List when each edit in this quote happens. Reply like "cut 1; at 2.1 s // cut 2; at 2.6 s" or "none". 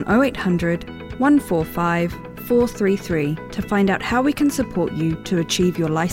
none